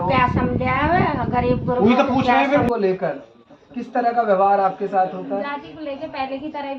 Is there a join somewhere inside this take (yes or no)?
yes